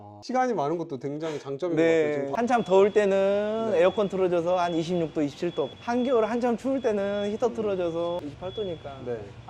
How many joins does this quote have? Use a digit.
1